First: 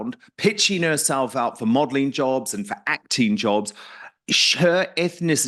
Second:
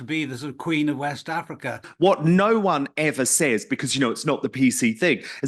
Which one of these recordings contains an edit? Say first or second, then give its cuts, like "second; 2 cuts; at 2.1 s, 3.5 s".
second; 1 cut; at 1.9 s